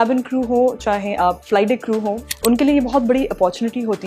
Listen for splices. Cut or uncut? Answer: cut